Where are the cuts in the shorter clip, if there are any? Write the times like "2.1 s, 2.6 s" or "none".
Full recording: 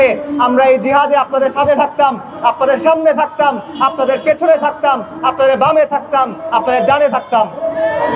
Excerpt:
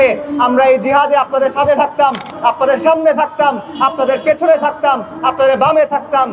none